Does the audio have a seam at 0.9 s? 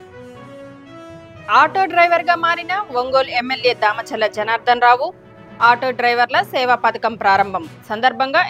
yes; 1 cut; at 0.9 s

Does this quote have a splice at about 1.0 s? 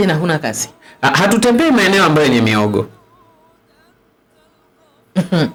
no; 0 cuts

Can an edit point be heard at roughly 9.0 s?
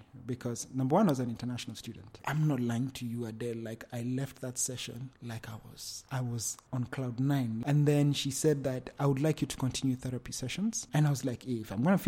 no; 3 cuts; at 2.1 s, 5.9 s, 7.6 s

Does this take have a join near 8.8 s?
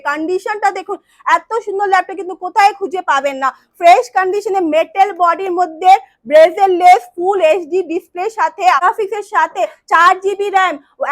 yes; 1 cut; at 8.8 s

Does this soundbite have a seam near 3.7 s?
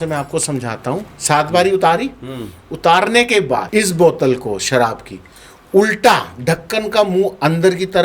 yes; 1 cut; at 3.7 s

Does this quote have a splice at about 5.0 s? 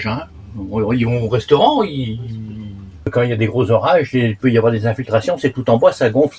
no; 1 cut; at 3.1 s

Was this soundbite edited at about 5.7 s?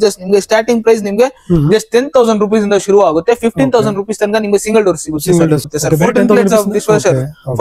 yes; 1 cut; at 5.7 s

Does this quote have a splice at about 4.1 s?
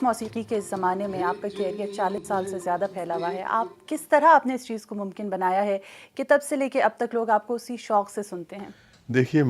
yes; 1 cut; at 4.1 s

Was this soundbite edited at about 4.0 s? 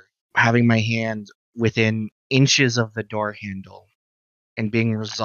no; 0 cuts

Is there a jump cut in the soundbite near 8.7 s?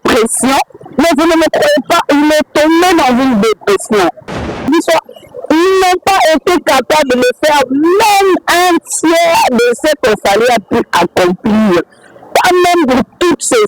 no; 1 cut; at 4.6 s

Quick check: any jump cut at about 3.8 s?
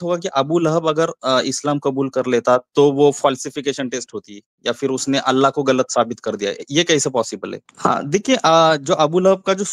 no; 1 cut; at 7.6 s

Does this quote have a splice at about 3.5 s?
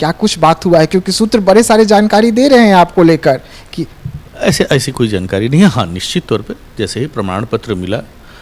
no; 0 cuts

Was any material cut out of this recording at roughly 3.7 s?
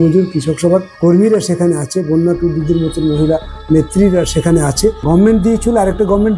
no; 2 cuts; at 0.9 s, 5.0 s

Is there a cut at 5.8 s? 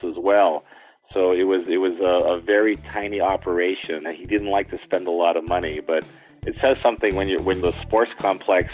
no; 2 cuts; at 4.1 s, 7.6 s

